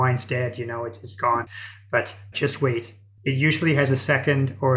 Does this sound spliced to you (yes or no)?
yes